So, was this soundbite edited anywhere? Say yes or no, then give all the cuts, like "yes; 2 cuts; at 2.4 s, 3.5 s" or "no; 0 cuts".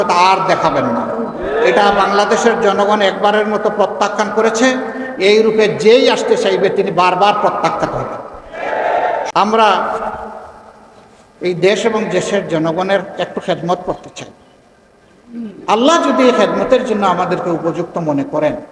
yes; 1 cut; at 9.2 s